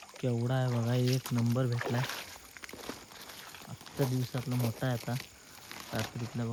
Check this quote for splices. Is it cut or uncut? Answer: uncut